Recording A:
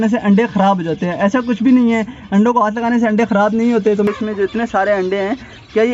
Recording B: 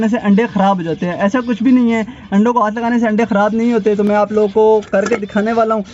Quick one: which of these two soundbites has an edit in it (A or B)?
A